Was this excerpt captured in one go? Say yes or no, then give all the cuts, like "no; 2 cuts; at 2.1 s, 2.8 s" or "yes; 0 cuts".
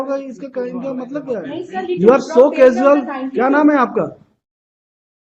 no; 1 cut; at 1.8 s